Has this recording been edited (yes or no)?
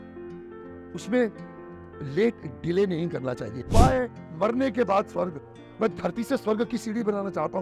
yes